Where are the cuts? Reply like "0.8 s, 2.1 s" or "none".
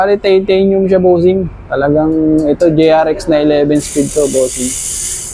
none